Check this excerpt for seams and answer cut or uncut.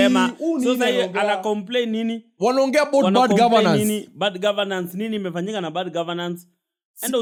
uncut